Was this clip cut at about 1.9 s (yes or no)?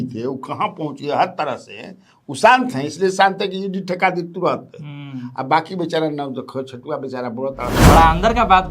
no